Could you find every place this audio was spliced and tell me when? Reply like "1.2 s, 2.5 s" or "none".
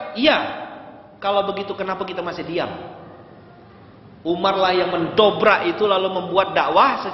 none